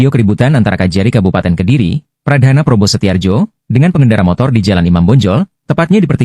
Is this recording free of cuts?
yes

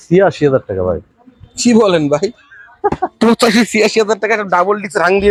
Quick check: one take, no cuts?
yes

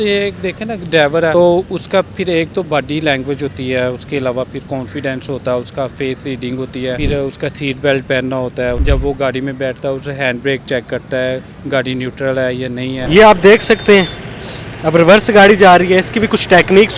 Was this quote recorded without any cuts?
no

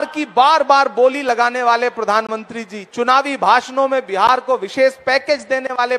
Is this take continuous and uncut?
yes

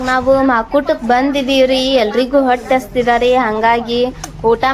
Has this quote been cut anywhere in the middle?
no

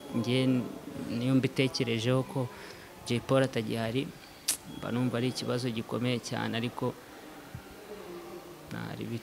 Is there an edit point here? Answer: no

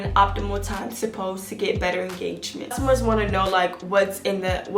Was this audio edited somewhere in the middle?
yes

